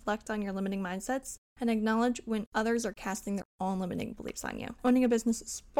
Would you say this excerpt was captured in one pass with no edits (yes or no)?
no